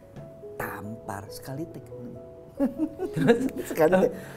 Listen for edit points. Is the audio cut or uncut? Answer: uncut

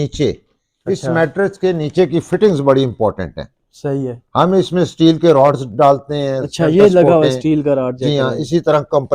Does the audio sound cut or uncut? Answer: uncut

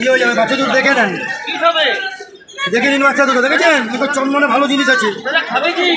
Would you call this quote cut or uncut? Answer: uncut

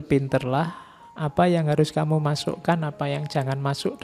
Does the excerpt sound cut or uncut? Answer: uncut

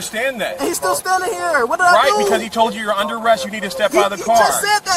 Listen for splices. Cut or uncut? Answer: uncut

